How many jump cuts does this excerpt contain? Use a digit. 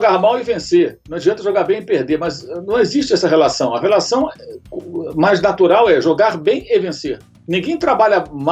0